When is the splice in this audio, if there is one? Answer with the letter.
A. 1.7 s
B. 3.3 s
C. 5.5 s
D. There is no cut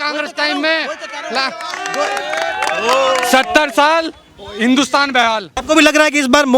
C